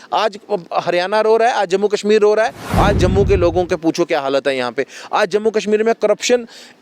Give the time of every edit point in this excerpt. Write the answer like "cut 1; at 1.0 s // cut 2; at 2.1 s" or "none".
cut 1; at 2.6 s